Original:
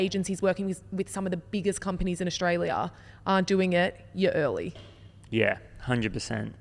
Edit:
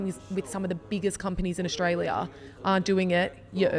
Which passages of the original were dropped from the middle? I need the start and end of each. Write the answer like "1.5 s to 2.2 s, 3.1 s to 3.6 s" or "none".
none

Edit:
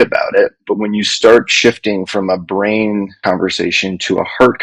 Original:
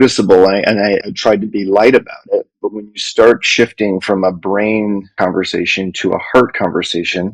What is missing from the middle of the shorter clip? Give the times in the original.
none

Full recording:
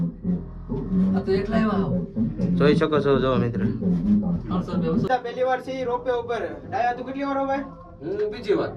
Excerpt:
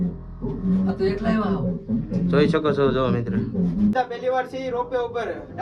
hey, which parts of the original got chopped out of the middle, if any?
4.2 s to 5.1 s

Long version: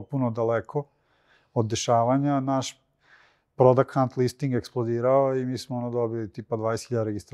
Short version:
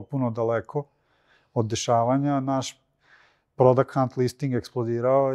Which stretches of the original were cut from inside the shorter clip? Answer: none

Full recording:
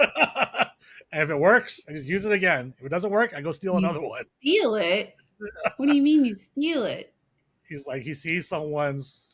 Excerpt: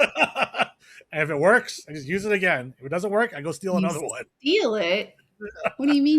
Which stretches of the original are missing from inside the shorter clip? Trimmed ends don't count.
none

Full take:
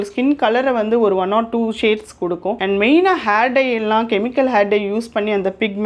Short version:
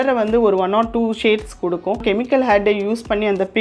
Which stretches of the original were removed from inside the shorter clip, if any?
2.6 s to 4.1 s

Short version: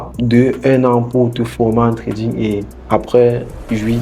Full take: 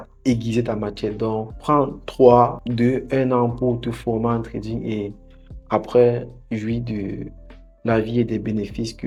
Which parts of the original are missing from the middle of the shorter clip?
5.2 s to 5.5 s

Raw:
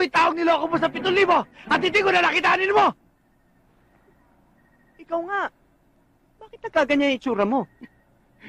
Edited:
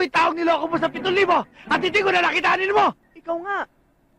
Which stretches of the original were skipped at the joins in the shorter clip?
3.1 s to 4.9 s

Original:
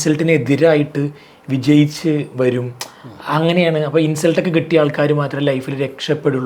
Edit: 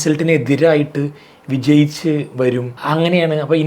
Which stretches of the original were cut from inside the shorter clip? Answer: 2.7 s to 3.2 s

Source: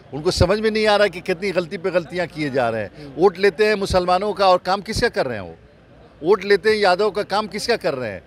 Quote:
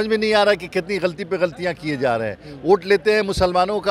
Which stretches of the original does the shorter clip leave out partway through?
none

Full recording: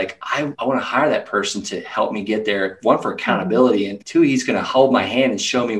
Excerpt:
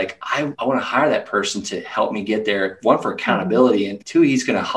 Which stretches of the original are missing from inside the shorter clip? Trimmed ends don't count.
none

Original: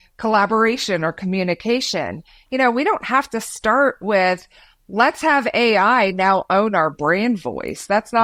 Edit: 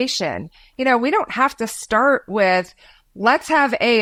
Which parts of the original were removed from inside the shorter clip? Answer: none

